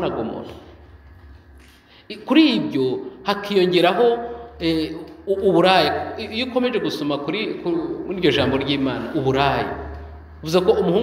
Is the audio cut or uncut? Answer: uncut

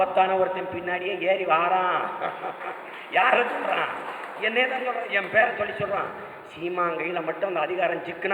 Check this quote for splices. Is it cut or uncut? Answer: uncut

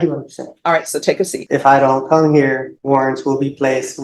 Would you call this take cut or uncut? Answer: cut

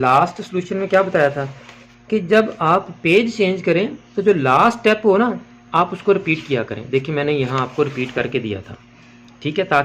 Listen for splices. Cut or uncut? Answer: uncut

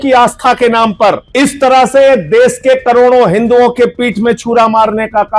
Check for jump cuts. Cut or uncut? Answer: cut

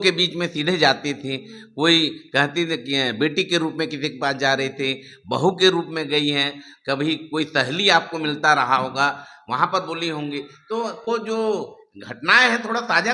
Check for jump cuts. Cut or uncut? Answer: uncut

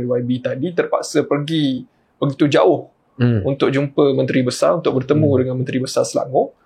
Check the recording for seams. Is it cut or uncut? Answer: uncut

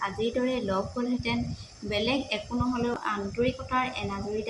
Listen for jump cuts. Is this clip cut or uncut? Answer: cut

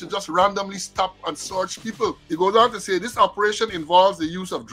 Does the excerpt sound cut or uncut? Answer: cut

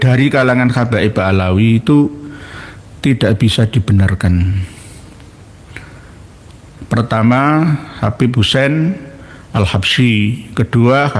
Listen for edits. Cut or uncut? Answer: uncut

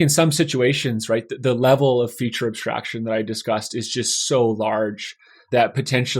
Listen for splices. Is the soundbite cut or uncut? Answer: uncut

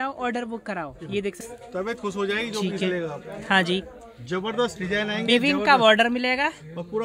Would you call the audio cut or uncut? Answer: cut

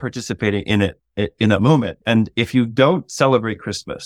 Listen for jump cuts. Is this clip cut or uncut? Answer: cut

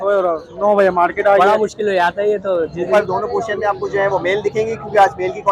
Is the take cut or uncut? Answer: cut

